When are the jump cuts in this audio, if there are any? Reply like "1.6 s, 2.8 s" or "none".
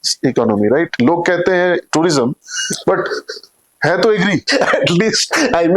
0.9 s, 4.5 s